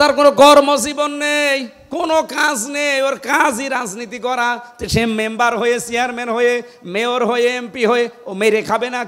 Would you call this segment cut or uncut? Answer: uncut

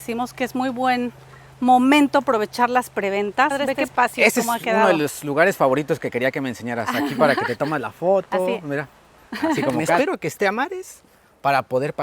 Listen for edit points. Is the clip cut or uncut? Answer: cut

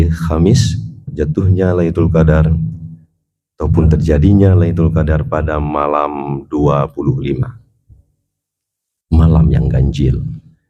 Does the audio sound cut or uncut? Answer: cut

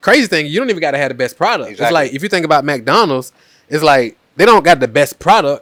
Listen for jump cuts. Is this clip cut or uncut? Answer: uncut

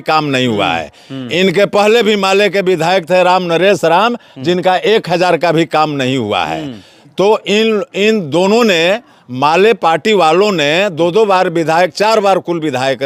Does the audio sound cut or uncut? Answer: uncut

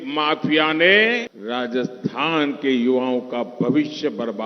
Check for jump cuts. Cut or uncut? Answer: cut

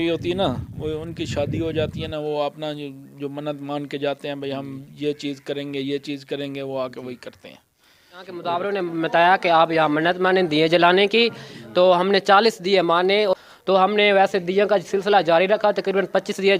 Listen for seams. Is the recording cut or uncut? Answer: cut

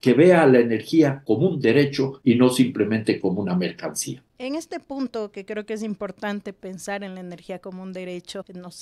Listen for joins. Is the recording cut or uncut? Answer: uncut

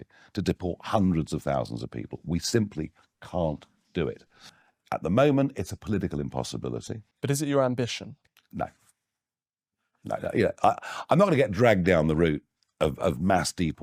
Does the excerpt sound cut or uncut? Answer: uncut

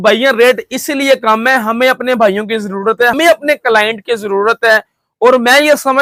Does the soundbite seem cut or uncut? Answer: uncut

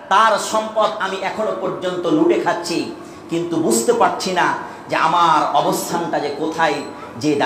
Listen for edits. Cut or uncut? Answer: uncut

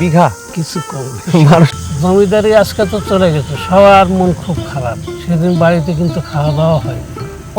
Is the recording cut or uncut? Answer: cut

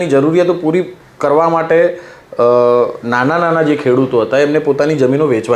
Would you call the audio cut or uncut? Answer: uncut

